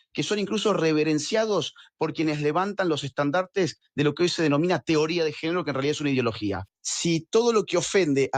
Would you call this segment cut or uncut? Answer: cut